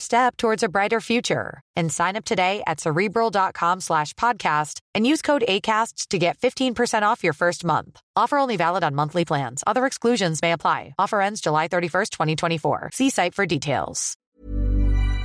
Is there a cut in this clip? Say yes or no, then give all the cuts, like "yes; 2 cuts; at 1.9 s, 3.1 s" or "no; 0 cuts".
yes; 1 cut; at 14.3 s